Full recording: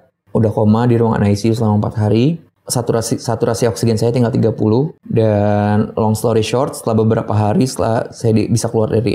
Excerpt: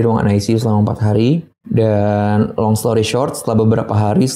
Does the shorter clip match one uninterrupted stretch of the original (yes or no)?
no